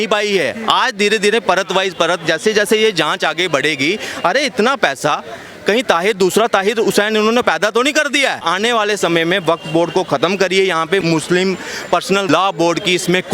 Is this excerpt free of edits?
no; 3 cuts; at 8.4 s, 11.0 s, 12.3 s

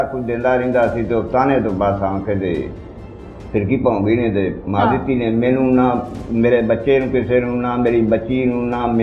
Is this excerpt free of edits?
yes; 0 cuts

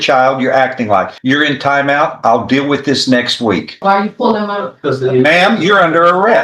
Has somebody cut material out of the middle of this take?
yes; 2 cuts; at 1.1 s, 3.8 s

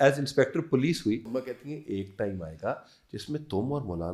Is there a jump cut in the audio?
yes; 1 cut; at 1.4 s

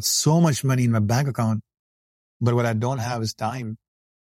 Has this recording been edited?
no; 0 cuts

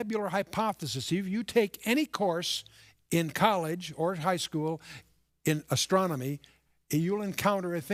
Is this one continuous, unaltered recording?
yes; 0 cuts

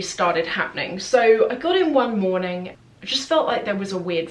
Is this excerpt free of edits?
no; 1 cut; at 2.7 s

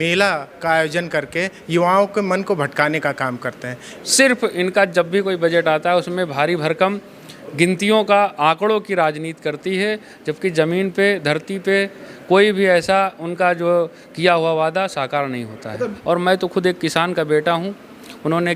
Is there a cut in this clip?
yes; 2 cuts; at 3.9 s, 16.0 s

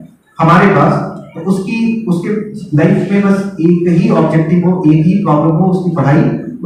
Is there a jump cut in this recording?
no; 0 cuts

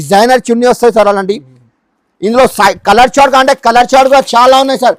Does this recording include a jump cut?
no; 0 cuts

